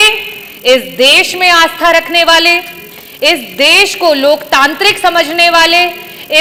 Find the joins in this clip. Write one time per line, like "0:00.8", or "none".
none